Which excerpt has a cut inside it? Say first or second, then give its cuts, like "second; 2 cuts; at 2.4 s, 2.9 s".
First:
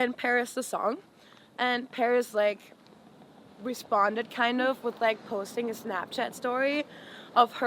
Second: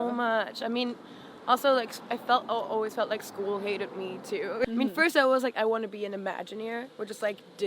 second; 1 cut; at 4.6 s